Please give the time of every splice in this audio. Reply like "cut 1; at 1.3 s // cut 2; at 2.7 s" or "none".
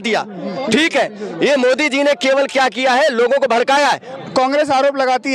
cut 1; at 4.1 s

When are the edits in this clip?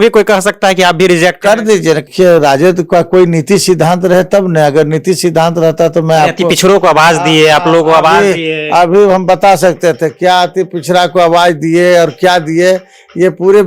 cut 1; at 2.0 s

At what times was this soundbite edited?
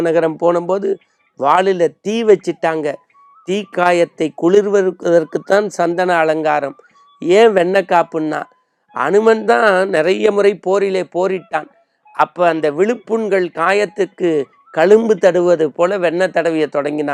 none

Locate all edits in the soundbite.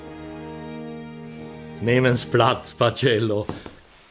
none

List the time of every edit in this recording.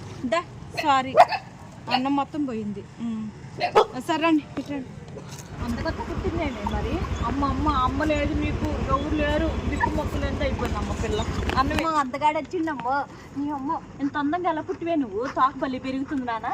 cut 1; at 5.5 s // cut 2; at 11.8 s

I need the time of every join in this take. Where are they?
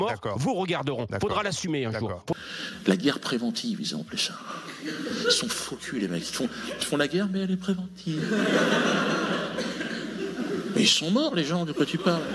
cut 1; at 2.3 s

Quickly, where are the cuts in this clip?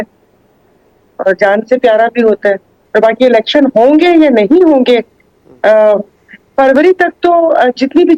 cut 1; at 2.7 s

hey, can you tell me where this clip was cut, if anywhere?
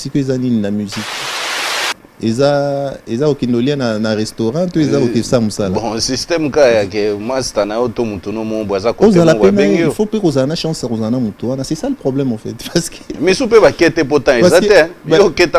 none

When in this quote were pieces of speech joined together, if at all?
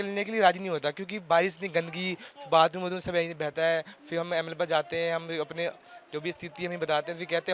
none

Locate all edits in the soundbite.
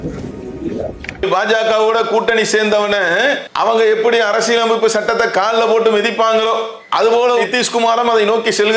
cut 1; at 1.2 s // cut 2; at 3.5 s

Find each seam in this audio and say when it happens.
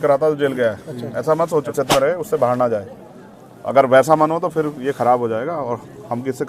cut 1; at 1.7 s

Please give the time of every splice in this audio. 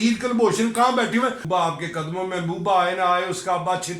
cut 1; at 1.4 s

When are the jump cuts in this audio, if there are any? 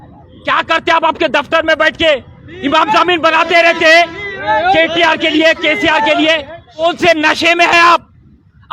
cut 1; at 6.8 s

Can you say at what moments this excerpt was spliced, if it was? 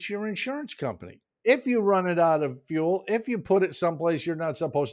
cut 1; at 1.2 s

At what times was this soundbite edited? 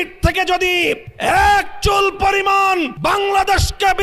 cut 1; at 1.1 s // cut 2; at 2.9 s

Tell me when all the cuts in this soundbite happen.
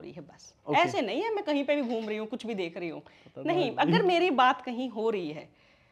none

